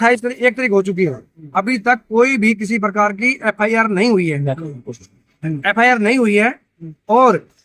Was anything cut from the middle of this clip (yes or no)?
no